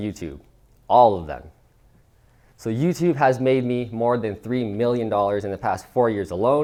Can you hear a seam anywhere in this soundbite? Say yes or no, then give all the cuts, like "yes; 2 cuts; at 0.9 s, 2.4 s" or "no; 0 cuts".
no; 0 cuts